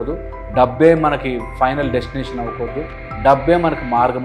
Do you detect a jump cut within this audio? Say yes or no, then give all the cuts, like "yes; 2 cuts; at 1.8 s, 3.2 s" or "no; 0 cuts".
no; 0 cuts